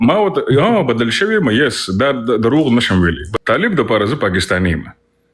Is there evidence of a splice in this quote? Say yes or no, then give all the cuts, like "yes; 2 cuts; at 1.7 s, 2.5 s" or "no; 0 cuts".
yes; 1 cut; at 3.3 s